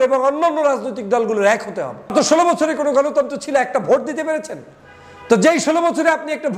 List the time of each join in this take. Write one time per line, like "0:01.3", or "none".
0:02.1

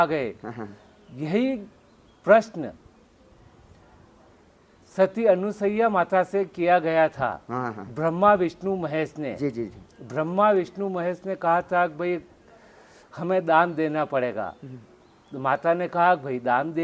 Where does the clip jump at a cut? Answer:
none

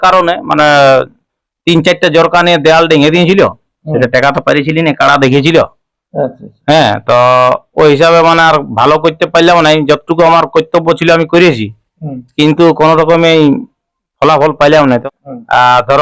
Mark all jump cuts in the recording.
0:14.8

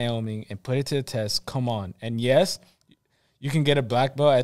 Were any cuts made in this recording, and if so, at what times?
none

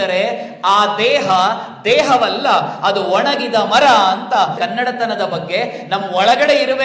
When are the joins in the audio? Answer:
0:04.6

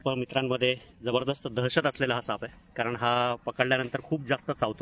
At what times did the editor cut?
none

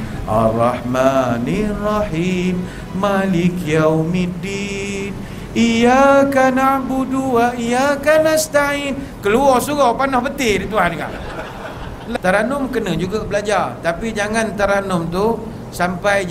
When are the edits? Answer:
0:12.0

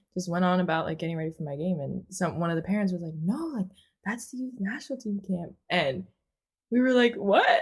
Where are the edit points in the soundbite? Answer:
none

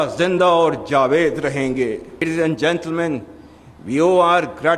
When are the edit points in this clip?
0:02.2

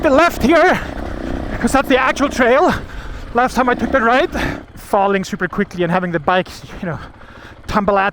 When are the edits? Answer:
0:04.6

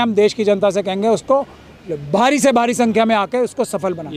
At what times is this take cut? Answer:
none

